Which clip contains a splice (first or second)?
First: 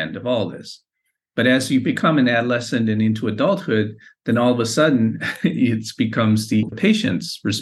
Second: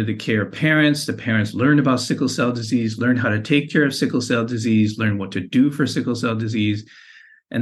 first